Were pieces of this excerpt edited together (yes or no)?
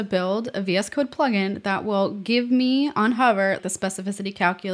yes